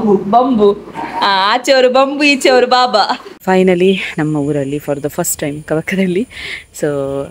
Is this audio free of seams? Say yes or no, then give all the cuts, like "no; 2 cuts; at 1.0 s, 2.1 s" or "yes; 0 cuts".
no; 1 cut; at 3.3 s